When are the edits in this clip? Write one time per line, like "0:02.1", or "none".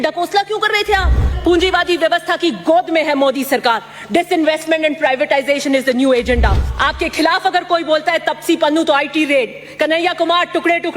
0:01.4
0:06.7